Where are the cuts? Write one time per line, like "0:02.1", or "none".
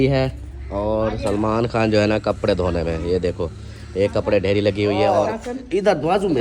0:05.3